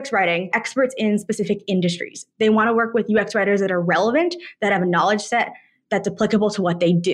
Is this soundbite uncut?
yes; 0 cuts

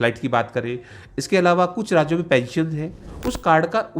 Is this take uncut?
no; 1 cut; at 3.1 s

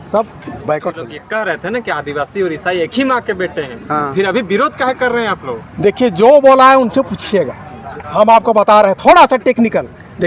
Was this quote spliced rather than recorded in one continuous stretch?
yes; 1 cut; at 1.1 s

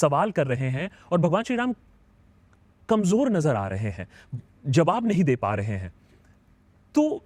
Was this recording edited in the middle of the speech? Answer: no; 0 cuts

